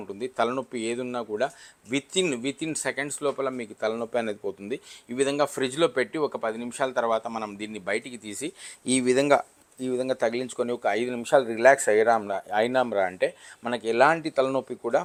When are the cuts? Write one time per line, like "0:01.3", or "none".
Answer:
none